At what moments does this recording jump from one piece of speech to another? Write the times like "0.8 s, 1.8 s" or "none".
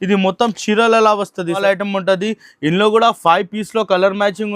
1.6 s